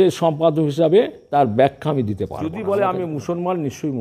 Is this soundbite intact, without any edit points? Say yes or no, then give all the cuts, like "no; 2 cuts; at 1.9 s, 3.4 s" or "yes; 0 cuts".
no; 2 cuts; at 1.2 s, 2.5 s